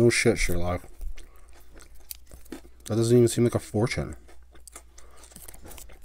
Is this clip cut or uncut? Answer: uncut